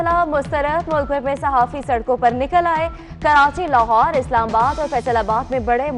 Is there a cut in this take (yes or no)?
no